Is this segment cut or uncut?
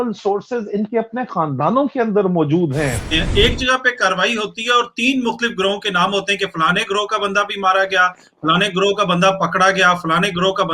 cut